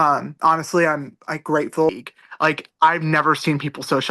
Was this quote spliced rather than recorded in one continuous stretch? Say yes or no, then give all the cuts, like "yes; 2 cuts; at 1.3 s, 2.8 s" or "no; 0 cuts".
yes; 1 cut; at 1.9 s